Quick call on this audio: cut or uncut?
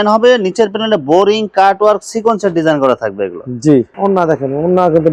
uncut